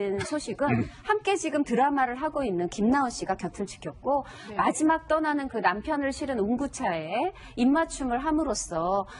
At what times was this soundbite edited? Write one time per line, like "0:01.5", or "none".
0:01.2